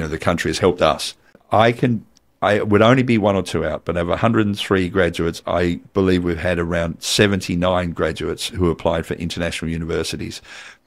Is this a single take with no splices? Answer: no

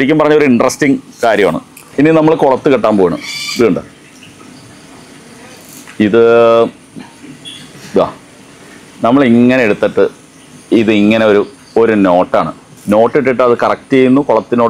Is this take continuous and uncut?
yes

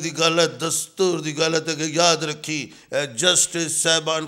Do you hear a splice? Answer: no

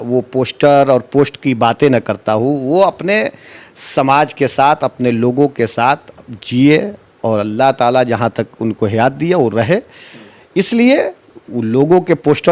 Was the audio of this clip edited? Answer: no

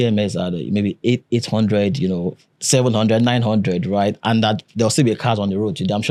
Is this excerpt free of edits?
yes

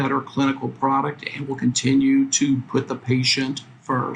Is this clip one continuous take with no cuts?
yes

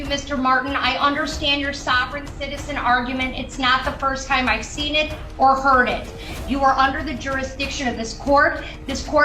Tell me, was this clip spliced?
no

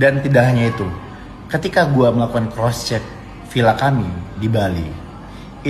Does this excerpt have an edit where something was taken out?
yes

